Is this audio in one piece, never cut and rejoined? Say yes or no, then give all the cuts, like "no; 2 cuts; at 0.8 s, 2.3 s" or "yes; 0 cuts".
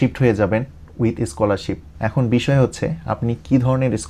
yes; 0 cuts